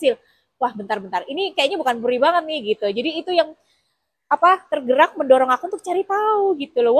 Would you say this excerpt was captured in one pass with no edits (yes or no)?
yes